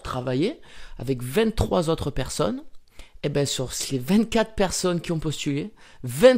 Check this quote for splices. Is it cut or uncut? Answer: uncut